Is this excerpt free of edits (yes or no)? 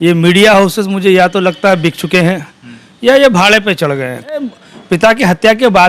no